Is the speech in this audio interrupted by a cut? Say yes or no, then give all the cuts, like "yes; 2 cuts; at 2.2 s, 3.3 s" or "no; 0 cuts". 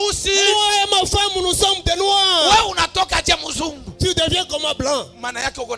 no; 0 cuts